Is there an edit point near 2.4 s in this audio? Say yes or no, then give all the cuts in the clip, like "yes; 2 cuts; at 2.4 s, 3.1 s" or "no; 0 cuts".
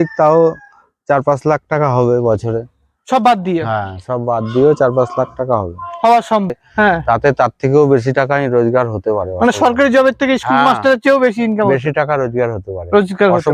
no; 1 cut; at 6.5 s